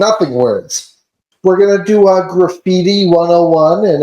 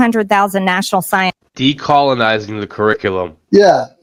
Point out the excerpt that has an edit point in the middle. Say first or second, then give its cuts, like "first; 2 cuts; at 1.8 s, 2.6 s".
first; 1 cut; at 1.2 s